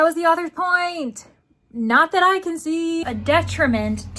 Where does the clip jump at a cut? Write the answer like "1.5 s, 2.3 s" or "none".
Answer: 3.0 s